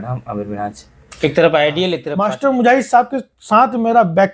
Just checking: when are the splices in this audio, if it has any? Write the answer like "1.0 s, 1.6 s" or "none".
2.0 s